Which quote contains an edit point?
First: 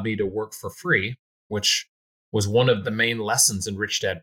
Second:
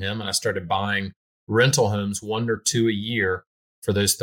first; 1 cut; at 2.8 s

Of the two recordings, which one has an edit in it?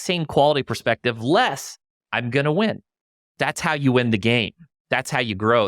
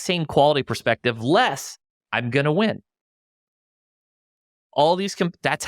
first; 1 cut; at 3.3 s

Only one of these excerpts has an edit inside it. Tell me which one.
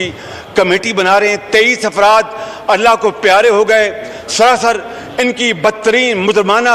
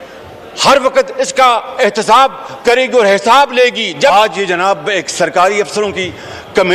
second; 1 cut; at 4.1 s

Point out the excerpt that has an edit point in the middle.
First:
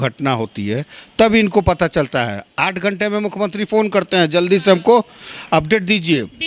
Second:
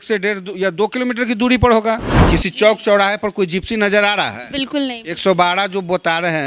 second; 1 cut; at 2.1 s

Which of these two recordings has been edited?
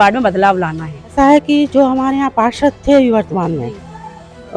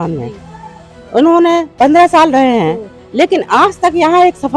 first; 1 cut; at 1.1 s

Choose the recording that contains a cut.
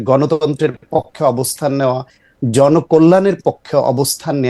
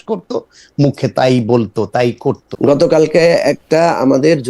second; 1 cut; at 2.5 s

